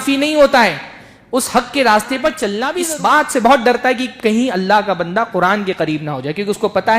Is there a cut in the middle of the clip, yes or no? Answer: yes